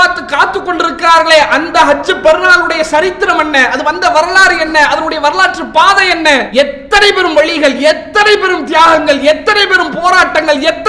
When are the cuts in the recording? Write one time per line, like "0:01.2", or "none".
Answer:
0:06.5